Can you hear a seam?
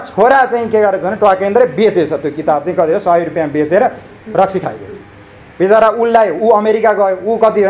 no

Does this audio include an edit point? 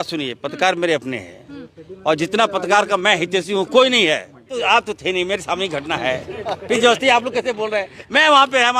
yes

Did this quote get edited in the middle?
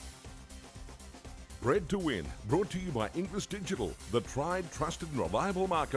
yes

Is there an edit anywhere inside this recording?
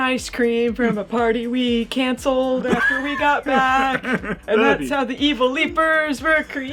no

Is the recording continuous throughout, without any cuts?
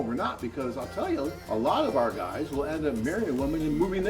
no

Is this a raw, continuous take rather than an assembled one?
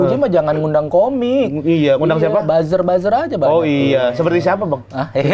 yes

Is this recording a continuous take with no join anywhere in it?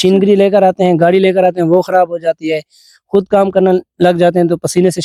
yes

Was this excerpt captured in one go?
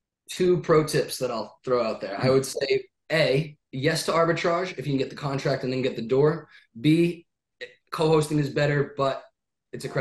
yes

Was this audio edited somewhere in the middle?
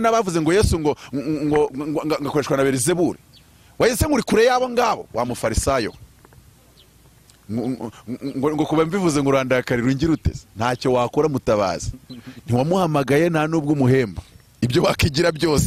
no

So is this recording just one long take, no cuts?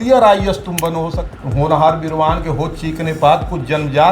no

